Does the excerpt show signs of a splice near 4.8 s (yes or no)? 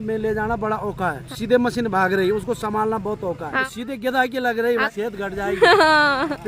yes